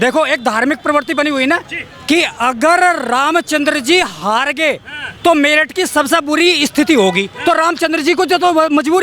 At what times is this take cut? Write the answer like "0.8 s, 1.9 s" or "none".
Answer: none